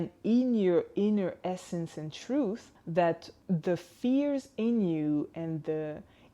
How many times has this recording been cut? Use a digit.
2